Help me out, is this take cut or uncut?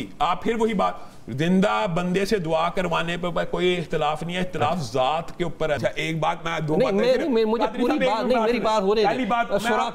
cut